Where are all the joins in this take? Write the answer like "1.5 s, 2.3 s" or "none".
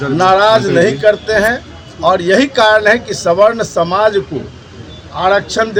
none